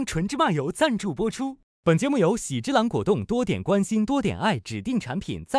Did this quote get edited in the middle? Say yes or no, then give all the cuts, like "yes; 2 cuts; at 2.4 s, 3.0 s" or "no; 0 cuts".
no; 0 cuts